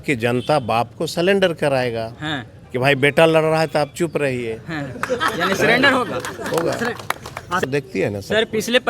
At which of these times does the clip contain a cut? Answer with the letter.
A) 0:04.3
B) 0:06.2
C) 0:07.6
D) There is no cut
C